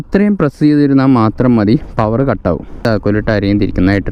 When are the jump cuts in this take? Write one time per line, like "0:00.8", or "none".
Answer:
0:02.8